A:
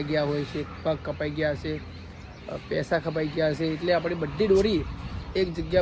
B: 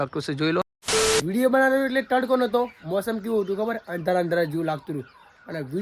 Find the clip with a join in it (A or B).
B